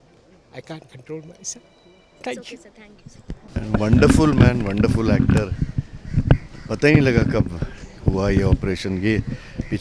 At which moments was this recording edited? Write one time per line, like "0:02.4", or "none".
0:03.4